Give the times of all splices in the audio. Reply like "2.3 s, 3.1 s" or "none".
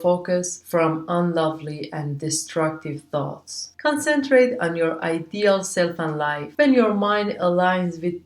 6.4 s